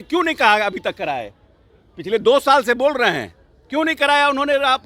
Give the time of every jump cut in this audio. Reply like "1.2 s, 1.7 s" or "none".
none